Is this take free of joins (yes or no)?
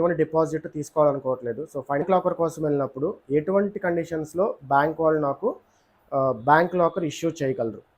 no